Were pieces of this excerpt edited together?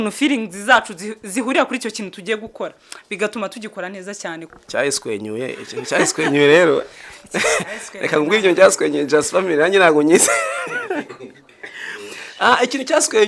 yes; 1 cut; at 4.5 s

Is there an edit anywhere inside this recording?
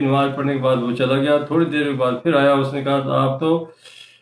no; 0 cuts

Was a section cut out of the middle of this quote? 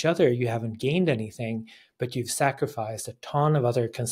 no; 0 cuts

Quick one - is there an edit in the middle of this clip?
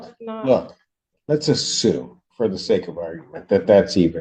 no; 0 cuts

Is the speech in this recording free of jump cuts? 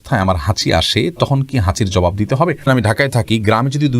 no; 1 cut; at 2.6 s

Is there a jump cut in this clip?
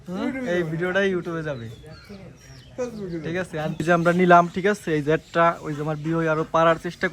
yes; 1 cut; at 3.7 s

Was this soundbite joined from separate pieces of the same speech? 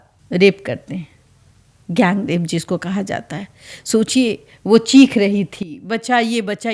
no; 0 cuts

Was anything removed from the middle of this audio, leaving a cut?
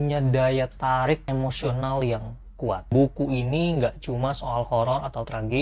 yes; 2 cuts; at 1.2 s, 2.8 s

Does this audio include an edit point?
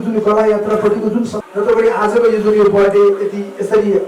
yes; 1 cut; at 1.4 s

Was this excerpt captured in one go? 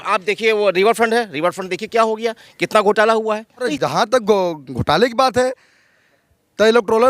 no; 1 cut; at 3.7 s

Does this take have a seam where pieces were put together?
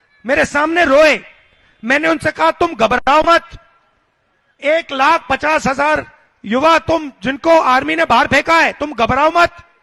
no; 0 cuts

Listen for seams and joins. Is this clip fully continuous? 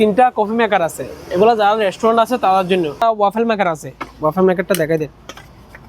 no; 1 cut; at 3.0 s

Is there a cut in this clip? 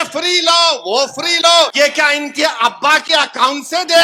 yes; 1 cut; at 1.7 s

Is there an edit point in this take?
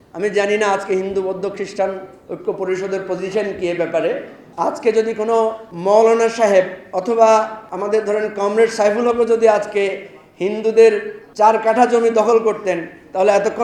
yes; 5 cuts; at 4.4 s, 5.7 s, 6.8 s, 7.6 s, 11.2 s

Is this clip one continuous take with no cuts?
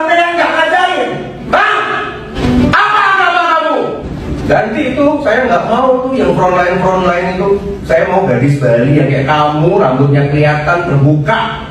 no; 2 cuts; at 1.4 s, 2.3 s

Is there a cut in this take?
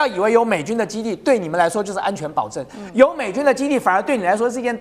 no; 0 cuts

